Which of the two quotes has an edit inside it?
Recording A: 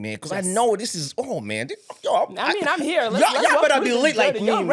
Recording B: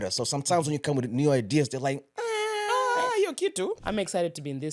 B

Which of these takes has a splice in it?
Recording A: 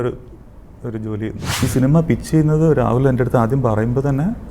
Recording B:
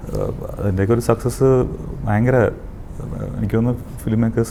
A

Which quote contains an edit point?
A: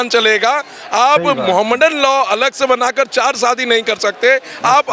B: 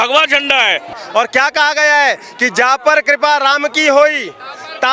B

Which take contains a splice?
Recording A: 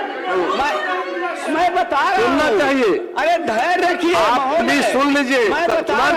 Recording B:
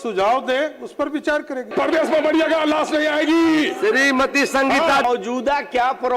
B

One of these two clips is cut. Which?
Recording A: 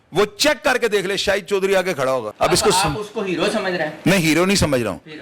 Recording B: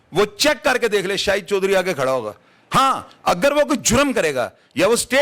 A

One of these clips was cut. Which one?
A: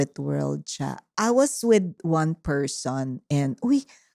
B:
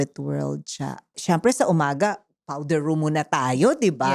A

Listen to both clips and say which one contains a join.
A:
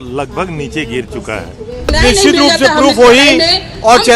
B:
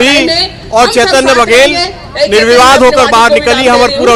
A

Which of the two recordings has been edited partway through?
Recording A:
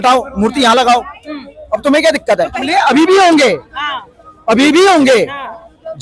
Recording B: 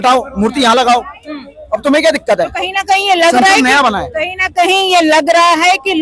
A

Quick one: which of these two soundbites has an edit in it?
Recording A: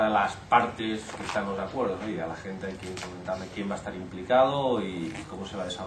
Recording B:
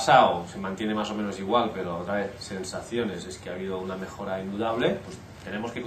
A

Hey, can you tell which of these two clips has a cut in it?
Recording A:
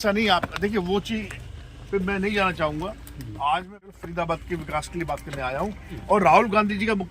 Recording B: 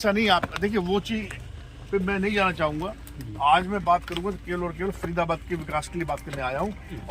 A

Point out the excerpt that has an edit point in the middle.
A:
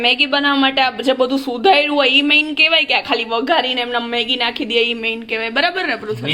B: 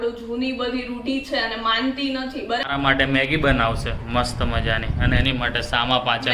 B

